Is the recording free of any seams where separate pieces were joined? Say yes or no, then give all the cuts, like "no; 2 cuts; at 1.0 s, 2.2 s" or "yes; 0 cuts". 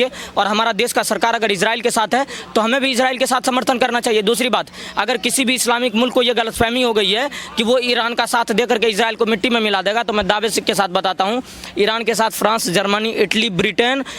yes; 0 cuts